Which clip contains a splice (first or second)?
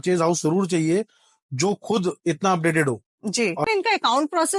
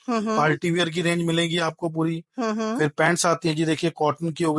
first